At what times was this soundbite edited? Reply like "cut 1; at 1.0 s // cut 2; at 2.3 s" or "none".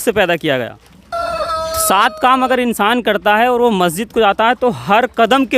cut 1; at 1.1 s